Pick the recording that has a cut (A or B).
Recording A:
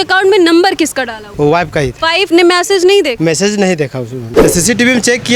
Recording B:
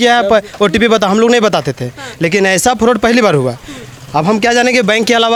A